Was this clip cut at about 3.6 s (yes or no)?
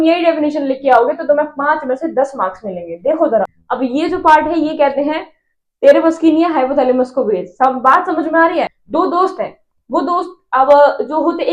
yes